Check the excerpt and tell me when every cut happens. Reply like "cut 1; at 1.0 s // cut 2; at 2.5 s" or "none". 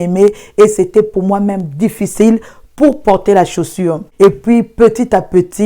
cut 1; at 4.0 s